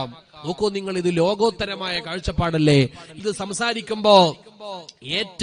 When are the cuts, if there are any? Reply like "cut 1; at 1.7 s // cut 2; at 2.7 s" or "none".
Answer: cut 1; at 3.1 s